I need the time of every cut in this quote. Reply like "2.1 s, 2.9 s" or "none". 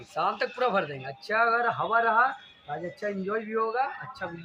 none